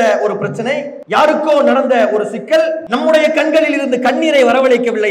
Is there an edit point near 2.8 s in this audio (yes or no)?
yes